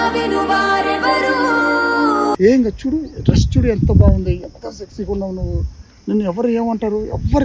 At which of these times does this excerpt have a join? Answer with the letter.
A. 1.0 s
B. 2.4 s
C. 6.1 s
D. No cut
B